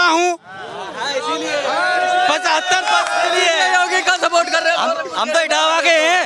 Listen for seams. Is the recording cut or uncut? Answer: uncut